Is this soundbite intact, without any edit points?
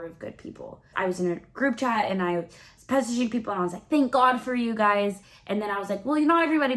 no; 1 cut; at 0.9 s

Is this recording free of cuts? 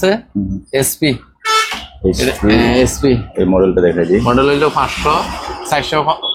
yes; 0 cuts

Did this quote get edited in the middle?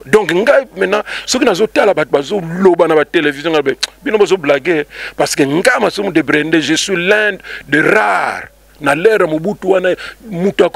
no; 0 cuts

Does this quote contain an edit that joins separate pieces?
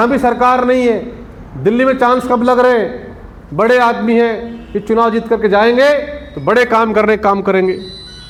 no; 0 cuts

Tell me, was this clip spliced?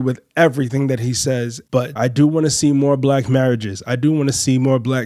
yes; 1 cut; at 1.8 s

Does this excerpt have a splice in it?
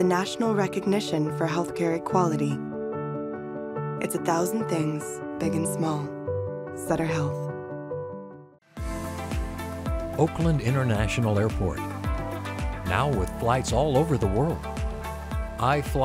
yes; 1 cut; at 8.4 s

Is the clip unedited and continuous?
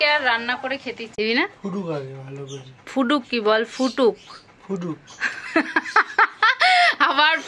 no; 1 cut; at 1.1 s

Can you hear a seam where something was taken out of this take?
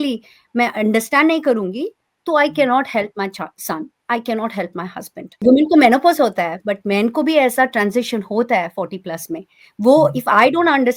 yes; 1 cut; at 5.4 s

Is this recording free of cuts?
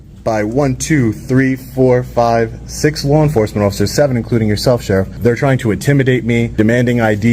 no; 2 cuts; at 5.1 s, 6.5 s

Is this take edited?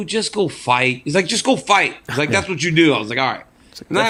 no; 0 cuts

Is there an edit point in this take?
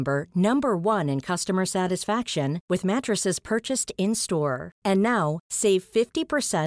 no; 0 cuts

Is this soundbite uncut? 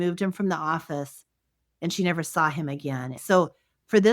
no; 1 cut; at 3.1 s

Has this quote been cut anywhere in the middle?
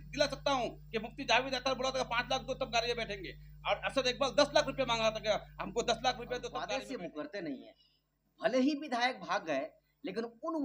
yes; 1 cut; at 6.7 s

